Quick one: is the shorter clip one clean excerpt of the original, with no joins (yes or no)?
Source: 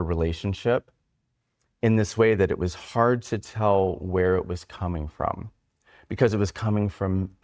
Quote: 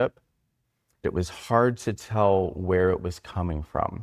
no